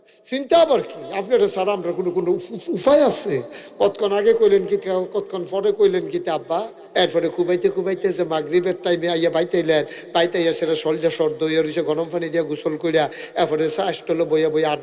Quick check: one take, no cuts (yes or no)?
no